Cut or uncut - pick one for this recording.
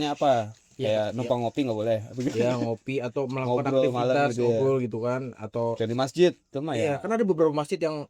cut